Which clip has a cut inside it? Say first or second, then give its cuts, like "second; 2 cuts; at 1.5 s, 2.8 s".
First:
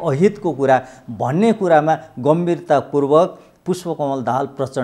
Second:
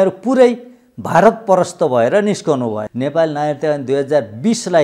second; 1 cut; at 2.9 s